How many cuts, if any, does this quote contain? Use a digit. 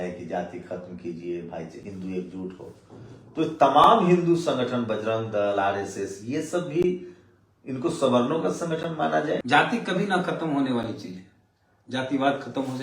1